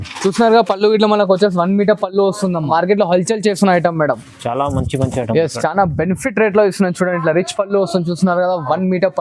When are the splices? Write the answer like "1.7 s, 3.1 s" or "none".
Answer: 2.7 s